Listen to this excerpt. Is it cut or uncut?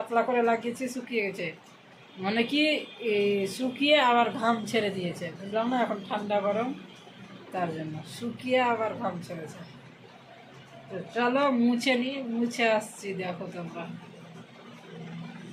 uncut